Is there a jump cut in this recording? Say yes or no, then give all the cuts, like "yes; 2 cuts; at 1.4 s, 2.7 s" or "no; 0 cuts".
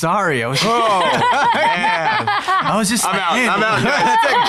no; 0 cuts